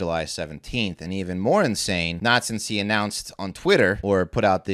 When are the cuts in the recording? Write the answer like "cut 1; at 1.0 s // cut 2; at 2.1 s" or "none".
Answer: cut 1; at 2.1 s // cut 2; at 4.0 s